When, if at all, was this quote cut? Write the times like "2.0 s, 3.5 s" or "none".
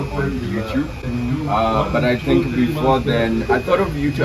none